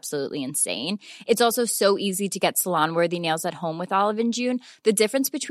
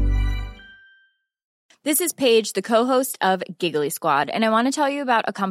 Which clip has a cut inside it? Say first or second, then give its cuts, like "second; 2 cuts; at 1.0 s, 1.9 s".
second; 1 cut; at 1.5 s